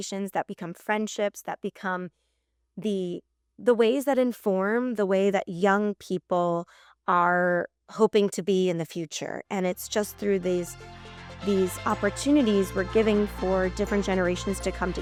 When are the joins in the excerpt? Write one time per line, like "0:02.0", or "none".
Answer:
none